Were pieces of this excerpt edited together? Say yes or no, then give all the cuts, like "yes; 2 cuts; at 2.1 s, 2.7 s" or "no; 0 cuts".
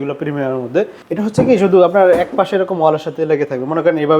yes; 1 cut; at 1.0 s